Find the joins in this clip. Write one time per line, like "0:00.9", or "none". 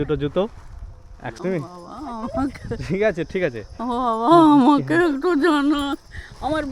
0:01.3